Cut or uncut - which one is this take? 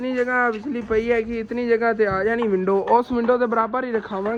uncut